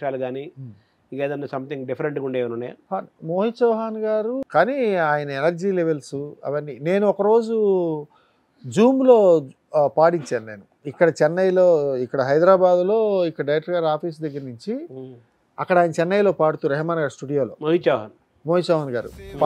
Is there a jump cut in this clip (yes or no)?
yes